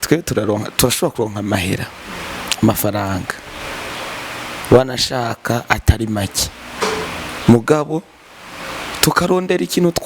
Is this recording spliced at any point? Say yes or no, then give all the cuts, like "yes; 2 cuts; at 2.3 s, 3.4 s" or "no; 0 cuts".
no; 0 cuts